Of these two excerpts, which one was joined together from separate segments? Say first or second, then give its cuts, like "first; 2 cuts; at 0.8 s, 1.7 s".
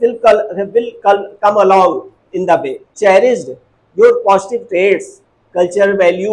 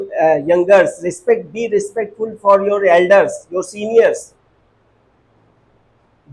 first; 1 cut; at 2.9 s